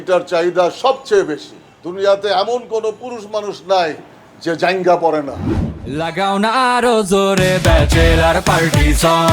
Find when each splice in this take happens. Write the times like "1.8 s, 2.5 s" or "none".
5.9 s